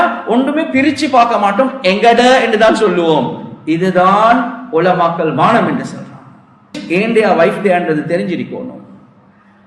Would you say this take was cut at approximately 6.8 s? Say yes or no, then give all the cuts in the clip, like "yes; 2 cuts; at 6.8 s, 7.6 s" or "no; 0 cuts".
yes; 1 cut; at 6.8 s